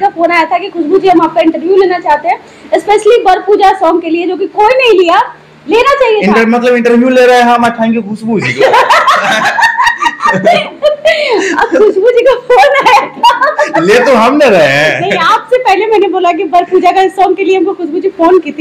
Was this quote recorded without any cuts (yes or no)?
yes